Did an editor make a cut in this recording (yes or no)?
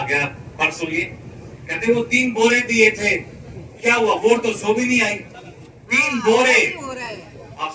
no